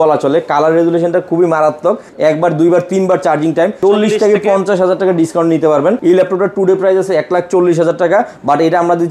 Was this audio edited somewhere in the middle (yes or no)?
yes